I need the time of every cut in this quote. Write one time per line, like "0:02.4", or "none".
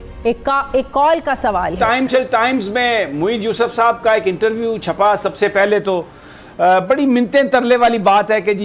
0:01.7